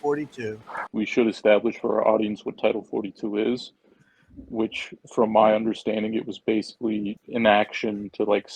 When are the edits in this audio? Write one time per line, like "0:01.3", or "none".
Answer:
0:00.9
0:07.2